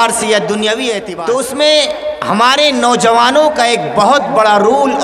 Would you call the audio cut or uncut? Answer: cut